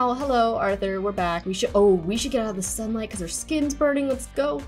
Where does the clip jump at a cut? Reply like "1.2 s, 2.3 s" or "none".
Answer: none